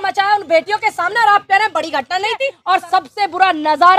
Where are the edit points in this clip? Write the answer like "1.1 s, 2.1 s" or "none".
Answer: 2.5 s